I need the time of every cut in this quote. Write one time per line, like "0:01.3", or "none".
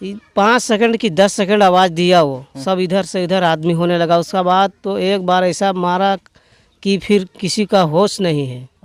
none